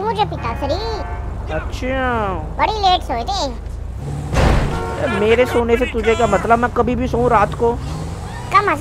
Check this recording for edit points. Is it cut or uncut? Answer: uncut